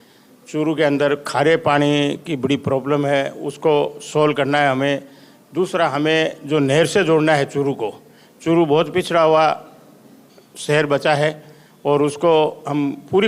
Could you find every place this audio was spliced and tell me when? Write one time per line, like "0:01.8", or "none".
none